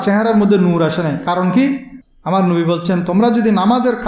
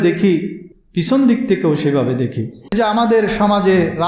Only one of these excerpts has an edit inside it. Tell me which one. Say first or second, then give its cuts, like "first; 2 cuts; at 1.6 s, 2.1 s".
second; 1 cut; at 2.6 s